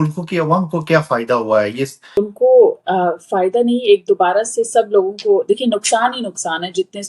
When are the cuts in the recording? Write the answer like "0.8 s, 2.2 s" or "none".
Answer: 2.1 s